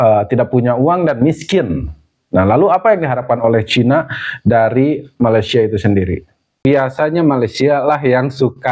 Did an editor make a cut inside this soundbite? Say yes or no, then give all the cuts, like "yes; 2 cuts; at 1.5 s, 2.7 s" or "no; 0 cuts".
yes; 1 cut; at 6.6 s